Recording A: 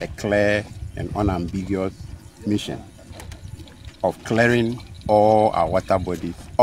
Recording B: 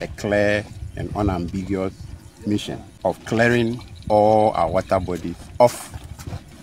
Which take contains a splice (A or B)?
B